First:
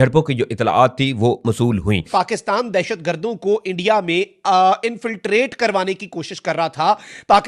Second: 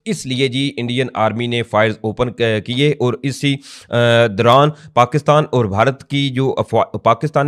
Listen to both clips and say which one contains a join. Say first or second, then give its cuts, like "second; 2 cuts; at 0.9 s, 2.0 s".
first; 1 cut; at 2.1 s